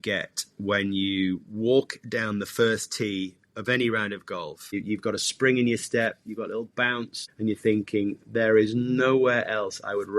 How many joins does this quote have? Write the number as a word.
two